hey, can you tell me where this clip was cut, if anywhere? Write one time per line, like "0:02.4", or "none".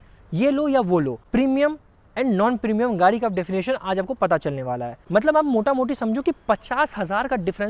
0:01.2
0:05.0